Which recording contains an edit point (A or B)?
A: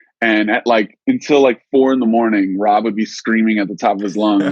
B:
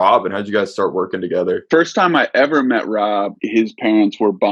B